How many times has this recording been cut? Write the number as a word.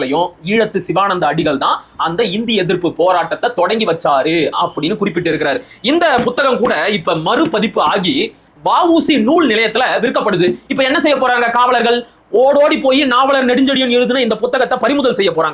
zero